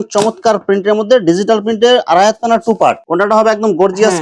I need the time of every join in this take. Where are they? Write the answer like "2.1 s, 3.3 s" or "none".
3.0 s